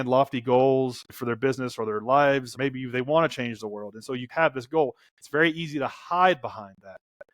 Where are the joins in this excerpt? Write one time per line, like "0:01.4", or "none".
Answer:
0:01.1
0:02.5